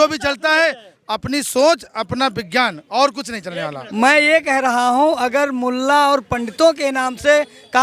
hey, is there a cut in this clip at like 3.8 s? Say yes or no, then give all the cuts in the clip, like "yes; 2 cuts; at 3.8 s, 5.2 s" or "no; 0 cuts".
yes; 1 cut; at 3.8 s